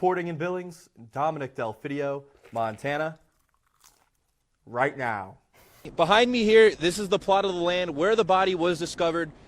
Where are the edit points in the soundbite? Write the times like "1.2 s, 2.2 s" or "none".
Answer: 5.8 s